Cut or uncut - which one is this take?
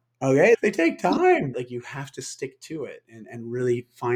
cut